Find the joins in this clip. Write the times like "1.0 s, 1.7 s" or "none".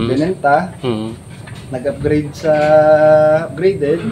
none